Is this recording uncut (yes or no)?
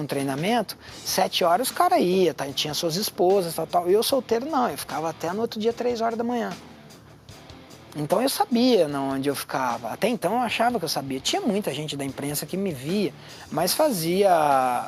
yes